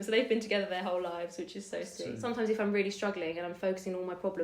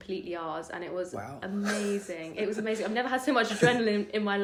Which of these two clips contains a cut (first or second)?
first